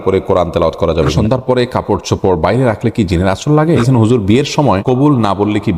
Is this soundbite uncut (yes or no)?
no